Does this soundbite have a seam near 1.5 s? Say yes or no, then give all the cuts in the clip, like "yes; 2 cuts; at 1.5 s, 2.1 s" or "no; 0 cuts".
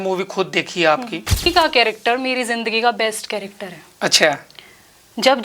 yes; 1 cut; at 1.5 s